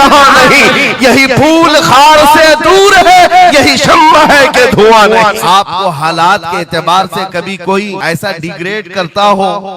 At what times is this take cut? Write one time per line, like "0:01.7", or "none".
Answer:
0:05.4
0:08.0